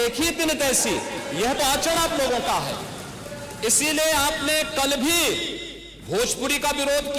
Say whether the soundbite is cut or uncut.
uncut